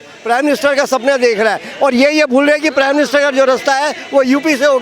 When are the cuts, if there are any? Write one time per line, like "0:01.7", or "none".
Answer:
none